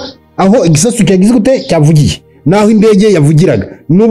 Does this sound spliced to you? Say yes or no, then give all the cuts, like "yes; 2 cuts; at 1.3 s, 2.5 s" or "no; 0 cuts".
no; 0 cuts